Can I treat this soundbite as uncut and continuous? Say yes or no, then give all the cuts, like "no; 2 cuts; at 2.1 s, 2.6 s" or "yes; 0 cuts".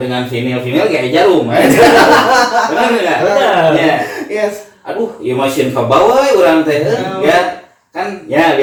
yes; 0 cuts